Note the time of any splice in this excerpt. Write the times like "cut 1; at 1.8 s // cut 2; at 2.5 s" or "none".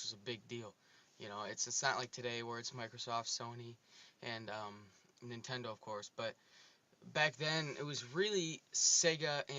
cut 1; at 4.4 s